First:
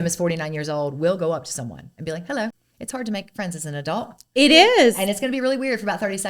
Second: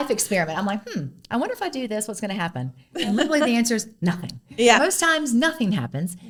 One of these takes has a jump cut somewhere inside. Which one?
first; 1 cut; at 2.7 s

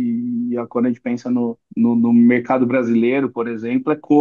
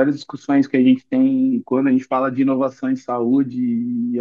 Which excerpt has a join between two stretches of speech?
first; 1 cut; at 1.6 s

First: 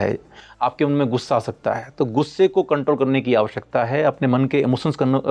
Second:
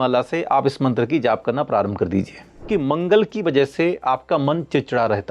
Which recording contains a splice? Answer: second; 1 cut; at 2.7 s

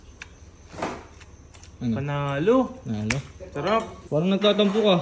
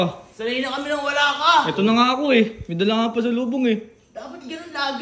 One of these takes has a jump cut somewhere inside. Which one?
first; 1 cut; at 4.0 s

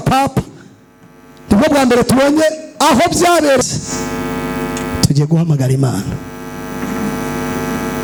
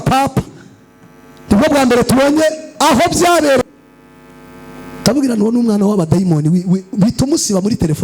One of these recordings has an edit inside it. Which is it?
second; 1 cut; at 3.8 s

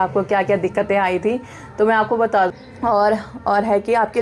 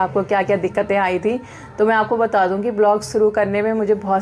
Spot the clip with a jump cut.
first; 1 cut; at 2.5 s

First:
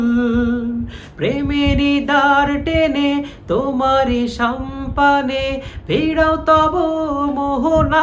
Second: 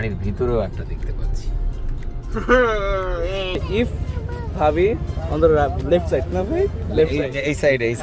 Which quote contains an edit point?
second; 1 cut; at 3.5 s

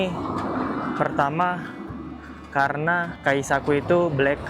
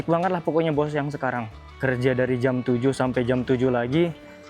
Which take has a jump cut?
first; 1 cut; at 3.1 s

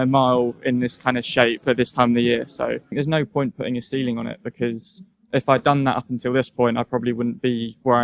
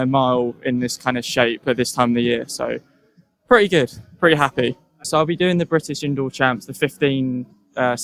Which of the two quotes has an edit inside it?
first; 1 cut; at 2.9 s

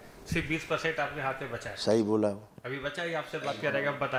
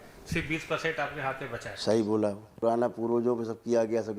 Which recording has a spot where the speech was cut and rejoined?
second; 1 cut; at 2.6 s

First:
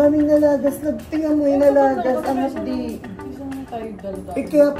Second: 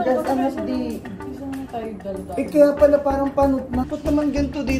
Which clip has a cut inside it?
second; 1 cut; at 3.9 s

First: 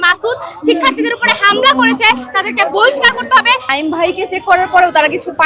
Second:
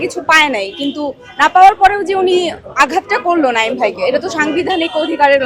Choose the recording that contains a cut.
first; 1 cut; at 3.7 s

